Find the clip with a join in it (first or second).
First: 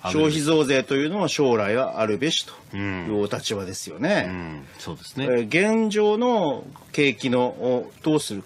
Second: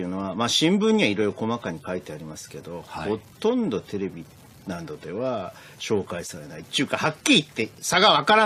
first